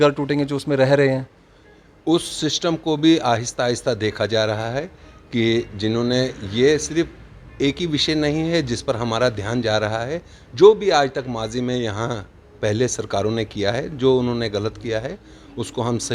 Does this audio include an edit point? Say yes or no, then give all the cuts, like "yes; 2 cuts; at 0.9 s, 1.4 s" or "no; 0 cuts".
no; 0 cuts